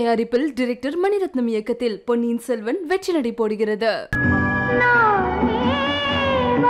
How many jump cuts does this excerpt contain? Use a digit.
1